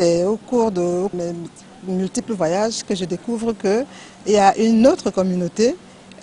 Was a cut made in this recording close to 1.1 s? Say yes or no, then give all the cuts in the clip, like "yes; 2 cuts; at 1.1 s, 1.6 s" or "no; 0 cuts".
yes; 1 cut; at 1.1 s